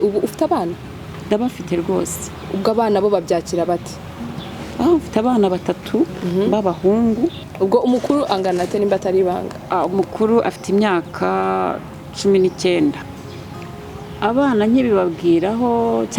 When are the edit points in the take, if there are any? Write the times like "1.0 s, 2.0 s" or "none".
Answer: 7.4 s, 13.1 s